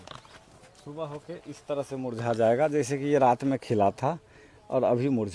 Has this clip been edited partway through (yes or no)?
no